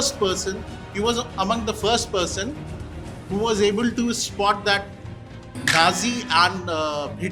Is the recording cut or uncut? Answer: uncut